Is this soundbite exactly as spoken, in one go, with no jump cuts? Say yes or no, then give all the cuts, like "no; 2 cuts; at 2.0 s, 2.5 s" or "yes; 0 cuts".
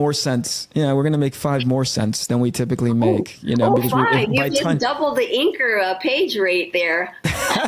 yes; 0 cuts